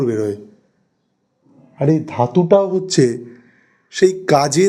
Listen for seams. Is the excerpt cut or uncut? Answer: uncut